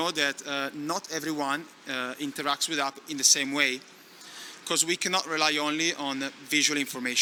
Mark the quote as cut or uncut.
uncut